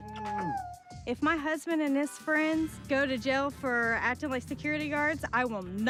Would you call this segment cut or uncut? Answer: uncut